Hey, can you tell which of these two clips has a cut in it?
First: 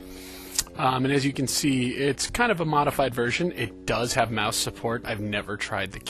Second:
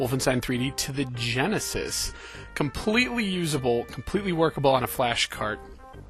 first; 1 cut; at 2.2 s

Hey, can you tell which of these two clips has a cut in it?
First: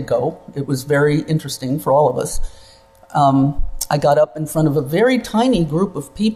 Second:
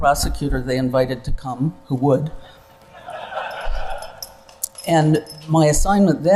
first; 1 cut; at 4.1 s

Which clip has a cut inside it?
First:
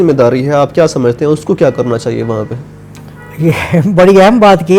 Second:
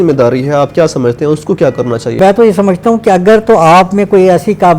second; 1 cut; at 2.2 s

